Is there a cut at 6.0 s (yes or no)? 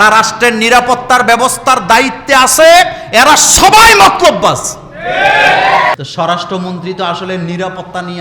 yes